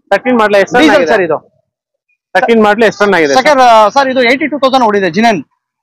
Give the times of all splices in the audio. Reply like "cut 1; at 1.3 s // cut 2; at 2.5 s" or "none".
none